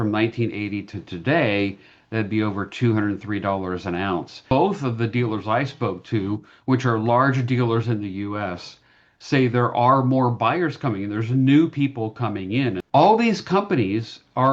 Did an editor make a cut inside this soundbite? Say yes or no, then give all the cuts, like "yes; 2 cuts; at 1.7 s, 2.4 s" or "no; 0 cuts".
yes; 2 cuts; at 4.4 s, 12.8 s